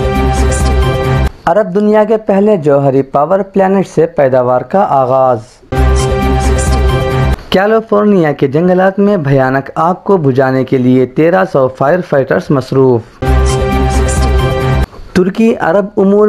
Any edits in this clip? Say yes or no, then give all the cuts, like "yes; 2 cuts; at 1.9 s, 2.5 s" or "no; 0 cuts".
yes; 4 cuts; at 1.3 s, 5.7 s, 13.2 s, 14.9 s